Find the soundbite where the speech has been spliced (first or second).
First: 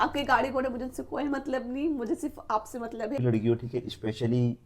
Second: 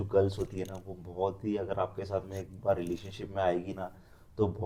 first